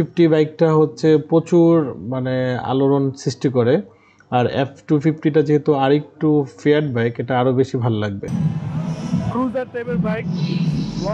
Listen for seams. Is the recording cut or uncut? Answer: uncut